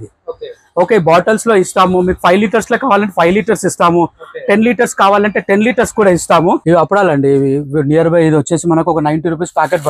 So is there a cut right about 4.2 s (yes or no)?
no